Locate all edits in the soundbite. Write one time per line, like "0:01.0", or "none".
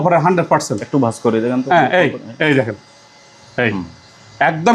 none